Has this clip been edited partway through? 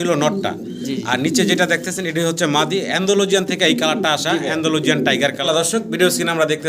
yes; 1 cut; at 5.4 s

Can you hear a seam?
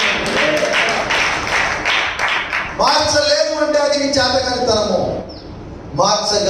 no; 0 cuts

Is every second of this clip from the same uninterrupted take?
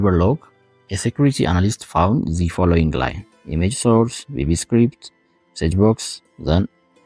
yes; 0 cuts

